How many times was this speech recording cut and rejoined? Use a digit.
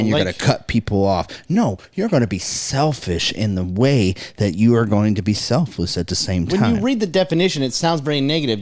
0